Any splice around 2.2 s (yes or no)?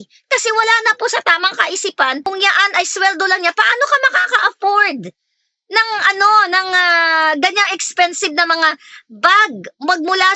yes